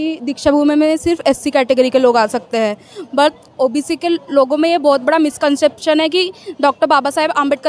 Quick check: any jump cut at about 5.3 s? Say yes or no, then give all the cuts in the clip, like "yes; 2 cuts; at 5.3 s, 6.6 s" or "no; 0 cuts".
no; 1 cut; at 3.6 s